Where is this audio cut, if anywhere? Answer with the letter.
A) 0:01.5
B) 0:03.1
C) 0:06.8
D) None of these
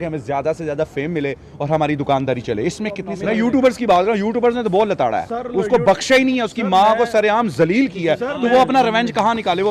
B